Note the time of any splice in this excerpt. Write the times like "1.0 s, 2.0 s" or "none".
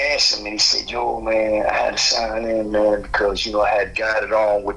none